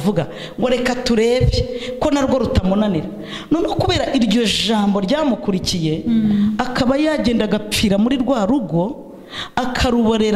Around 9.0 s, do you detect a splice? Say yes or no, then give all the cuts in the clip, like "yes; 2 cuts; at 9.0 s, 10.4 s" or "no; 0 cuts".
no; 0 cuts